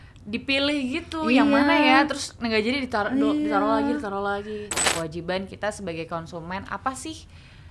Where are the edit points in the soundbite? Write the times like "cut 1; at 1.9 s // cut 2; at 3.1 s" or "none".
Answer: cut 1; at 4.7 s

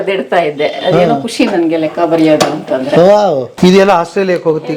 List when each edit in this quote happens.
cut 1; at 3.5 s

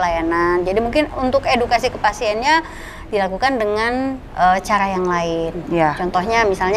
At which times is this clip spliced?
none

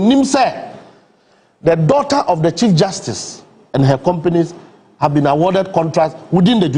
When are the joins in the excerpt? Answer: none

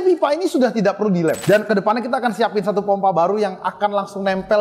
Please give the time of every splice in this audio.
cut 1; at 1.4 s

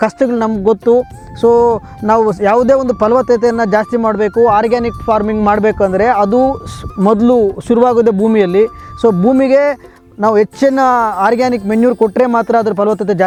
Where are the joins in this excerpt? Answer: none

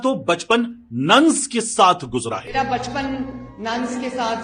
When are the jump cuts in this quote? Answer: none

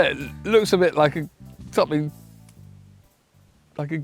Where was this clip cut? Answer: none

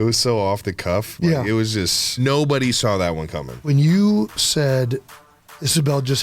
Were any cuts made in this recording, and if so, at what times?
cut 1; at 2.2 s

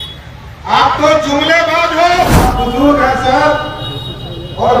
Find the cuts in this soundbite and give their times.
cut 1; at 2.4 s

